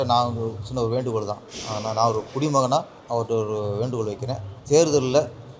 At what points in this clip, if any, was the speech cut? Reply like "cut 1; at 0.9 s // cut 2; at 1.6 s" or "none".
cut 1; at 3.0 s // cut 2; at 4.5 s